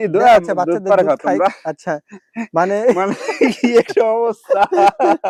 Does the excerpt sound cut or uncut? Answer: uncut